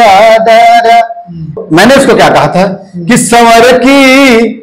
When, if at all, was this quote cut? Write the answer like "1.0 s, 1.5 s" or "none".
1.6 s